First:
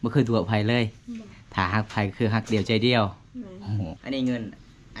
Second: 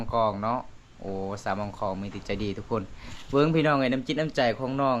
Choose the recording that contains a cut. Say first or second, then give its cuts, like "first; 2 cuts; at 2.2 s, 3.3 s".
first; 1 cut; at 3.9 s